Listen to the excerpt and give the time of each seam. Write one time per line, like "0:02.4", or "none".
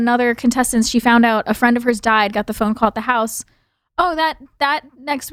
none